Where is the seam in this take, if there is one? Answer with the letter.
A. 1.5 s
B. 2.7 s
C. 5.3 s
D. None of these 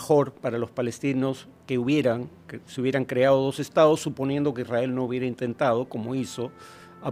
D